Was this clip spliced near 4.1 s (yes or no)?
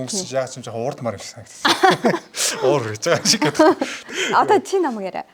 yes